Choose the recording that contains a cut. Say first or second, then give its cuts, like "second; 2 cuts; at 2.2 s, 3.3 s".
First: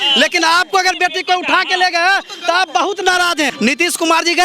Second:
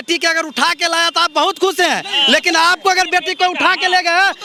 first; 1 cut; at 3.5 s